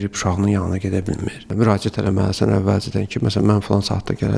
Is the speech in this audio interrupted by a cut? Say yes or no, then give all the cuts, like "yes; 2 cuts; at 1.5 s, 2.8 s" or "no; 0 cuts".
no; 0 cuts